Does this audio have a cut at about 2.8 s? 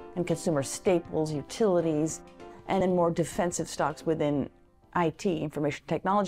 yes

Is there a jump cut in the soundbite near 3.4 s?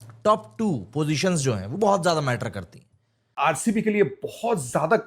yes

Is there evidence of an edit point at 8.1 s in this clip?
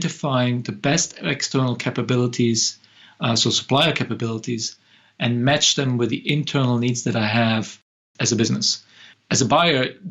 yes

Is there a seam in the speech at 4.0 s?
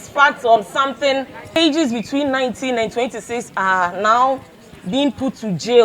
no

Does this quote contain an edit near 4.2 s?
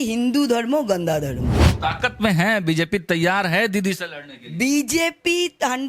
no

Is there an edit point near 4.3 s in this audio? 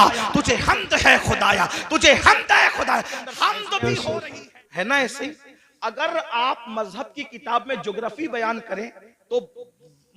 yes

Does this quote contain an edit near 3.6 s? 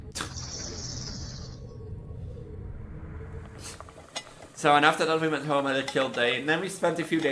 yes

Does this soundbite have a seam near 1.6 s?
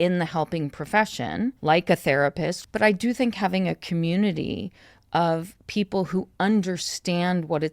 yes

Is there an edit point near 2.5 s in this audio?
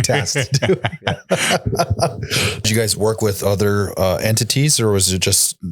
yes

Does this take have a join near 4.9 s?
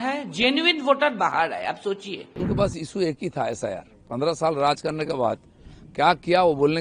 no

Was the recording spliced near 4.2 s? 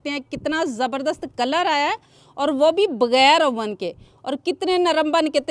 no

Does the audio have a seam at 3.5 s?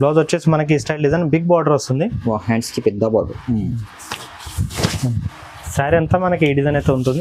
no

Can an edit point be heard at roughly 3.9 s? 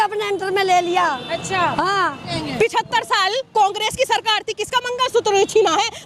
no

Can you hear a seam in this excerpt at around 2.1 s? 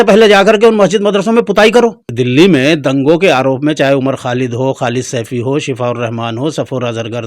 yes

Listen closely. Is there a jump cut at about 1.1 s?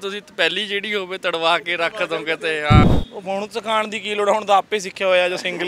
no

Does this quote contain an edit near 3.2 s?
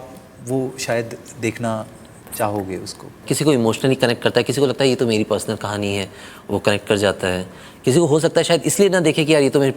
yes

